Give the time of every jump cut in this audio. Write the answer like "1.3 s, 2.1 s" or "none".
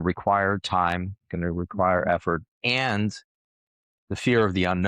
2.5 s